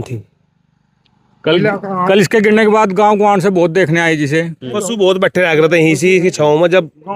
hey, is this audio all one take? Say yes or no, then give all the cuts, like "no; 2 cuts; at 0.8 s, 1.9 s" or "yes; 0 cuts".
no; 1 cut; at 4.8 s